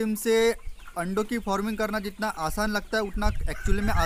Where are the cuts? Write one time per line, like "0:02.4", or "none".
none